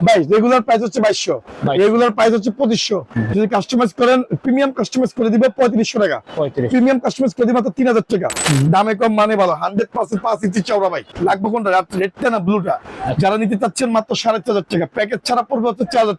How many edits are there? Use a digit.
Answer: 3